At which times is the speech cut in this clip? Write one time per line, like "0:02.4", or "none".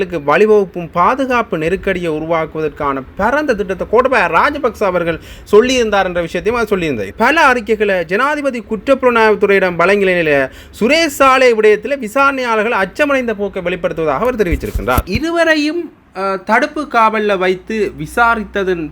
0:07.1
0:15.1